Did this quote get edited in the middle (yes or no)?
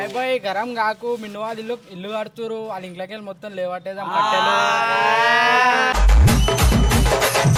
no